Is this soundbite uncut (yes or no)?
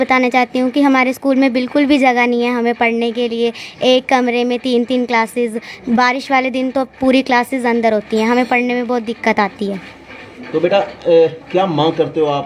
yes